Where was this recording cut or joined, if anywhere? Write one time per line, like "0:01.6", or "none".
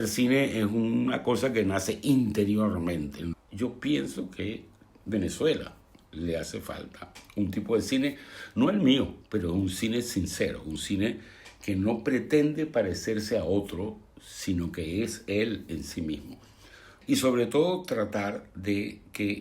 0:03.3
0:16.9

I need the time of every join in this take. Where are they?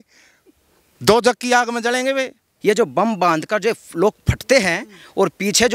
0:02.4

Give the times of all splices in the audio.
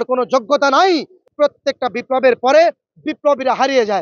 0:01.2

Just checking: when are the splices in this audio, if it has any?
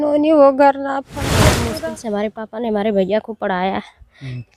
0:01.5

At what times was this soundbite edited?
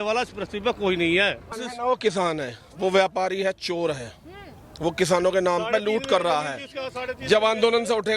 0:01.5

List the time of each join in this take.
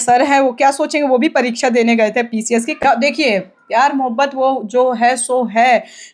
0:02.8

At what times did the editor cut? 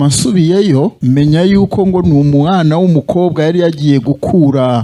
0:01.0

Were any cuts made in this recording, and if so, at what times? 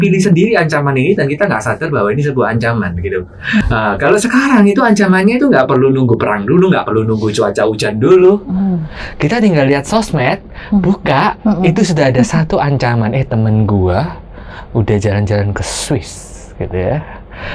0:03.6

